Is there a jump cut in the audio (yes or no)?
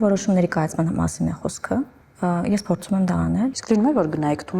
yes